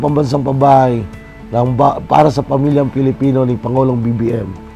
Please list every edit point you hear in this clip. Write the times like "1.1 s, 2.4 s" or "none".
none